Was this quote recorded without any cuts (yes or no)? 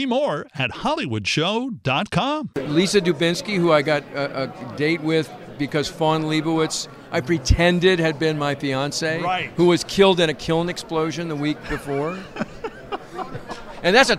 no